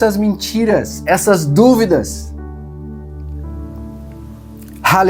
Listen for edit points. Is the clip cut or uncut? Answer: uncut